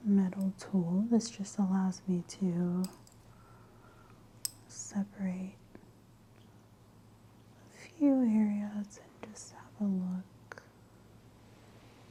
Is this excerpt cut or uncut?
uncut